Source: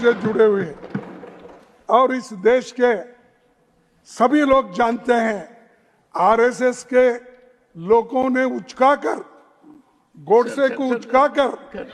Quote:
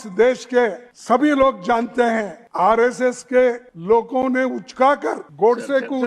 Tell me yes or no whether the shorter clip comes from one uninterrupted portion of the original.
no